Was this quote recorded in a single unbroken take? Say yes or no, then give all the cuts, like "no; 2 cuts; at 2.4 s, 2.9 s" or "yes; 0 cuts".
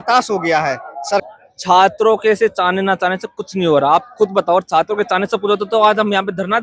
no; 1 cut; at 1.2 s